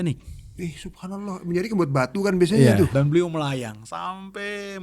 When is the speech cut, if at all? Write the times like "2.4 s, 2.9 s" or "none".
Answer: 2.9 s

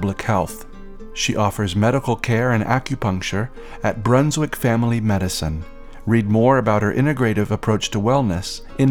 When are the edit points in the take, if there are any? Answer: none

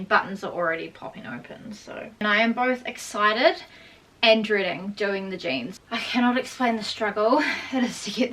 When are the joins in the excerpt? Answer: 2.1 s, 5.7 s

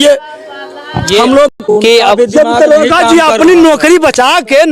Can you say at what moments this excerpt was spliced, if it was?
1.6 s

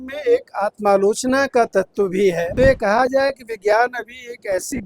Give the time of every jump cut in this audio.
2.5 s

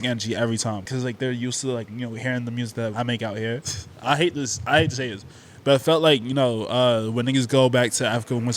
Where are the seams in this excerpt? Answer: 0.8 s, 3.6 s

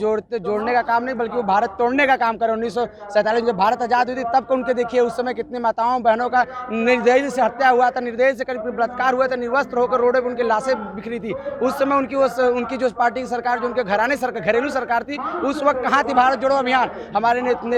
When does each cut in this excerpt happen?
none

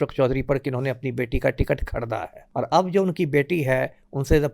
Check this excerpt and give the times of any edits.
2.4 s

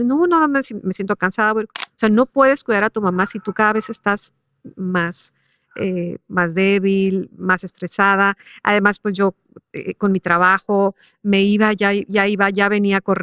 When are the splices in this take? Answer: 1.8 s

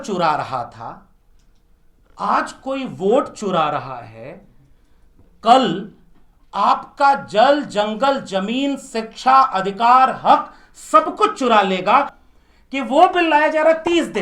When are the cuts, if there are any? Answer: 12.2 s

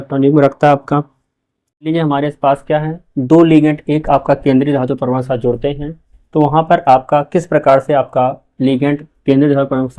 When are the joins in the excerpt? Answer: 1.9 s

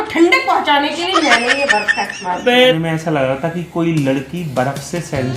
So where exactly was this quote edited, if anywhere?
2.8 s

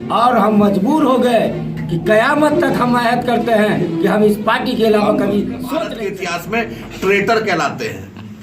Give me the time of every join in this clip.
5.9 s

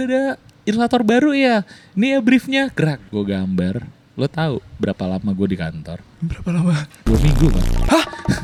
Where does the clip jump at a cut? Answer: none

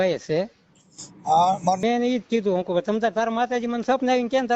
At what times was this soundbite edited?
1.8 s

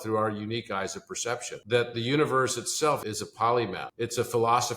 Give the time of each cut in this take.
1.5 s, 3.0 s, 3.9 s

